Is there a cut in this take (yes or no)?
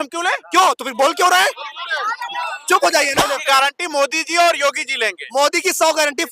yes